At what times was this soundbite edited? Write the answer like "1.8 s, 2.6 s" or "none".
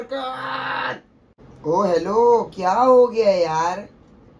1.4 s